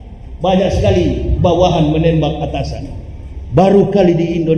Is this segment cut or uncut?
uncut